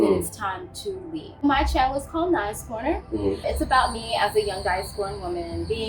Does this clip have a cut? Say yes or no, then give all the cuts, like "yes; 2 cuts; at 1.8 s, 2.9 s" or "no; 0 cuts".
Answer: yes; 1 cut; at 1.4 s